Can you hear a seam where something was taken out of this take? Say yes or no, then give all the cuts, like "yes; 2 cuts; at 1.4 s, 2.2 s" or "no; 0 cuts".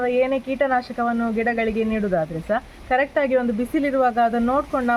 no; 0 cuts